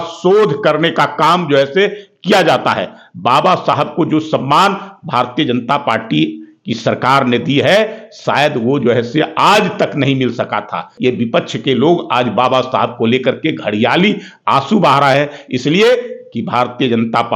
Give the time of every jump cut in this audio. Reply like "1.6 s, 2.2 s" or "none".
10.9 s